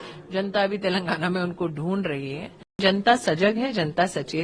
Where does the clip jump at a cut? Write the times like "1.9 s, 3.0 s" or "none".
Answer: 2.8 s